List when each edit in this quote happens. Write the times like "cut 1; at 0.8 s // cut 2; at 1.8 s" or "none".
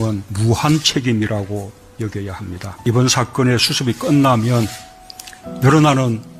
cut 1; at 4.8 s